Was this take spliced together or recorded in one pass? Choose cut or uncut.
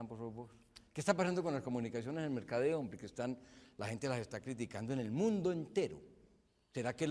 uncut